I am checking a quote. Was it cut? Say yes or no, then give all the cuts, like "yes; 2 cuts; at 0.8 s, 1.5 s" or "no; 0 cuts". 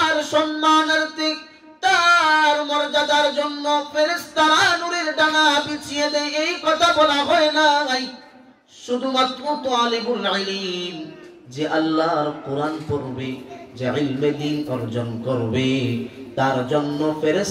no; 0 cuts